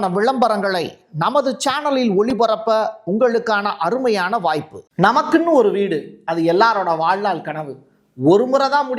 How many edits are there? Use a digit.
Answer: 1